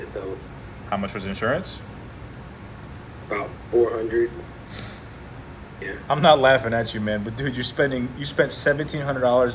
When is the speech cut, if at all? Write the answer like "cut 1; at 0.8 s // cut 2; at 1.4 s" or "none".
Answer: cut 1; at 5.8 s // cut 2; at 6.8 s